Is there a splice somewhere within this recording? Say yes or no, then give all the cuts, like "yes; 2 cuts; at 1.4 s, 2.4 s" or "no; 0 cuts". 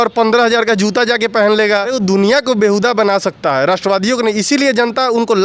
yes; 1 cut; at 1.9 s